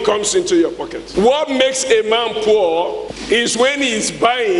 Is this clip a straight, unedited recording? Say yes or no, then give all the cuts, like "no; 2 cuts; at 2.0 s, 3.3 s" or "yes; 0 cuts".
no; 2 cuts; at 1.0 s, 3.1 s